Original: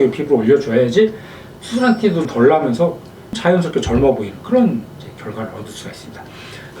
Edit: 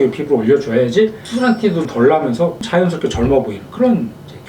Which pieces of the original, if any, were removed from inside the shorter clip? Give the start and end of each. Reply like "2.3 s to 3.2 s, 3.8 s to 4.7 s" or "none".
1.2 s to 1.6 s, 3.0 s to 3.3 s